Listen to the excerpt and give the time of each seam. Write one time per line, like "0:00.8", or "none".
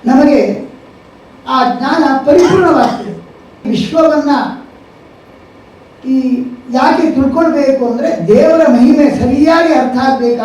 0:03.7

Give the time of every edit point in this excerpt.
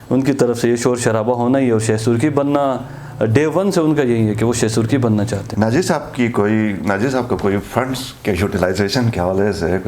0:05.5

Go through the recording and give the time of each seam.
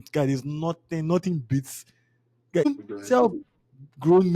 0:02.7

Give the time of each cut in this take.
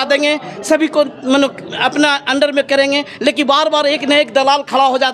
none

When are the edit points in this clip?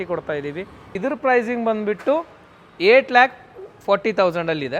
0:01.0

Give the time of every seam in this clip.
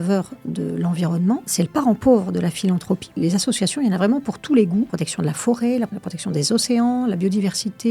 0:01.5
0:03.1
0:04.9
0:06.0

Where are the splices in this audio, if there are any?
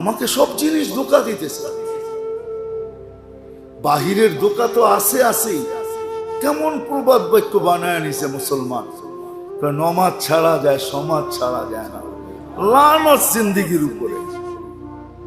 0:01.5
0:03.2
0:14.3

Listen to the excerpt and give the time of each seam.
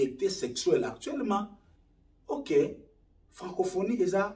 0:01.3

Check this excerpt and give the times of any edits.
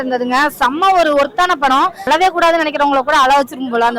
0:02.1

